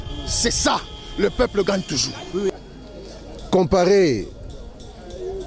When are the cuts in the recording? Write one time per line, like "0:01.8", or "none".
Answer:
0:02.5